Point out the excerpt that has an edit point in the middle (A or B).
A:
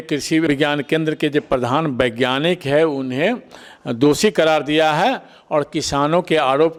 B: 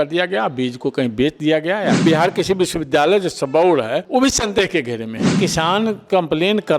B